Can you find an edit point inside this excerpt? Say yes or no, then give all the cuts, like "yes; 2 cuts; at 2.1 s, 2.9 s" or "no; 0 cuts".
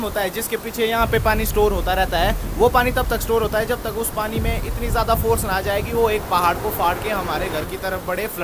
no; 0 cuts